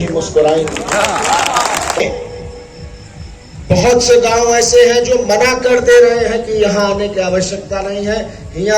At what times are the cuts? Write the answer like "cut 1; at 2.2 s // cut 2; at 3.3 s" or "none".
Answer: cut 1; at 2.0 s